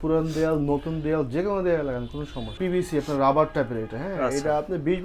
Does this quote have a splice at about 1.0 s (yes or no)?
no